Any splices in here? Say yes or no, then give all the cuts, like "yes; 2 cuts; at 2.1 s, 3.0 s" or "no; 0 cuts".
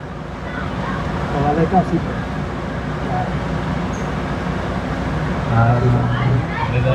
no; 0 cuts